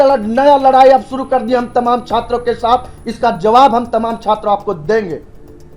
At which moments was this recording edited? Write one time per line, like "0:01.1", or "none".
none